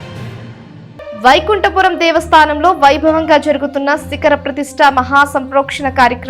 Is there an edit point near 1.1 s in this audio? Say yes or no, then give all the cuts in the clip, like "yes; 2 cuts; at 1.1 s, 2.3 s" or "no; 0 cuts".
yes; 1 cut; at 1.1 s